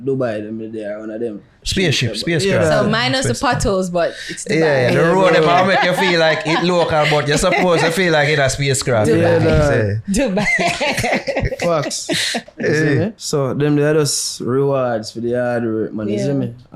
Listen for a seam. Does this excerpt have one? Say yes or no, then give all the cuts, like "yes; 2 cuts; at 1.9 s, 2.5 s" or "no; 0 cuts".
yes; 1 cut; at 13.2 s